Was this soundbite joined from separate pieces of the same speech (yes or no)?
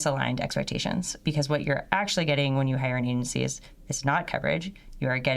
yes